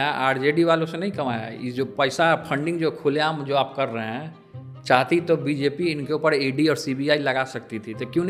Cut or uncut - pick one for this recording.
uncut